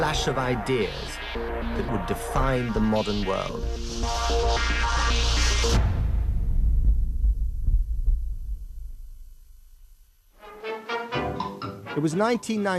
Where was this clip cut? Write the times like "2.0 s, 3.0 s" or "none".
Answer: none